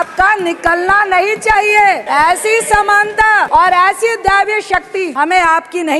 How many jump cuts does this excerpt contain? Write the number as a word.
three